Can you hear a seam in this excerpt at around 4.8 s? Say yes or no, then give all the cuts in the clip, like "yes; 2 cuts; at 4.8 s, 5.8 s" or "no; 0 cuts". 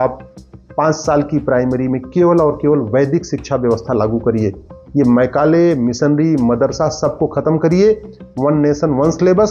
no; 0 cuts